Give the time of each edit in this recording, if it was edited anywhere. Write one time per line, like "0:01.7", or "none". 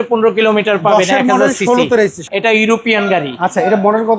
0:02.3